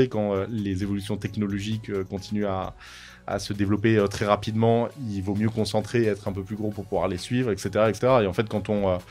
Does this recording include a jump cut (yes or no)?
yes